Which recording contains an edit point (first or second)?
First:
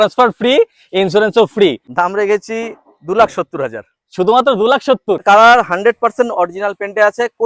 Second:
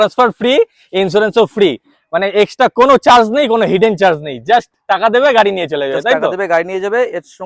first